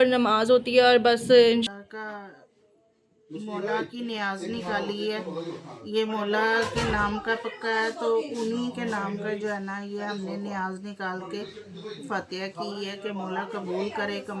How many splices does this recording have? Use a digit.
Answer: 1